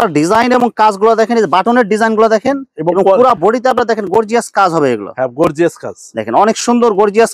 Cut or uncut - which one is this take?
uncut